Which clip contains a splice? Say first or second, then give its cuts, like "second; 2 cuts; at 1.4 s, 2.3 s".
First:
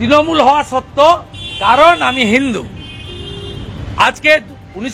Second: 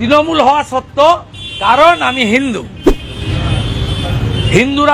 second; 1 cut; at 3.1 s